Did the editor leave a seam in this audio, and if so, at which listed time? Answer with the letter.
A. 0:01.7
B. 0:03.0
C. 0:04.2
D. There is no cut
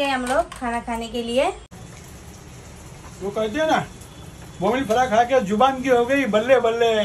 A